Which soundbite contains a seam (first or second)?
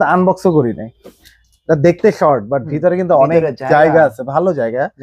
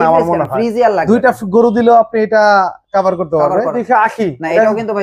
second